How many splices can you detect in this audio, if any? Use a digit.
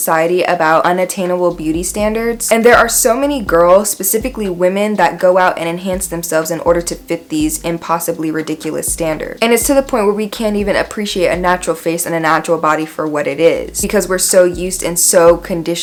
0